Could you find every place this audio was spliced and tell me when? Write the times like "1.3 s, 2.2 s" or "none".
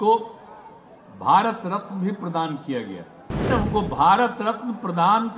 3.5 s

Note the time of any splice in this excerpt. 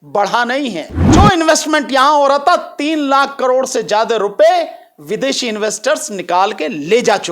0.9 s

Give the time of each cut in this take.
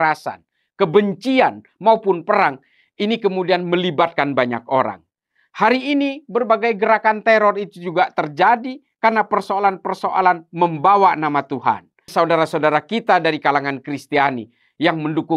12.1 s

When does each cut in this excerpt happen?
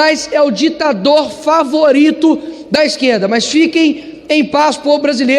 none

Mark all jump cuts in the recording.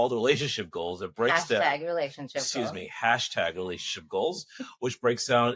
none

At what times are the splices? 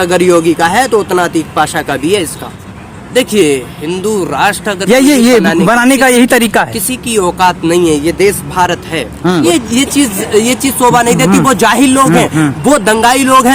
2.6 s, 9.4 s

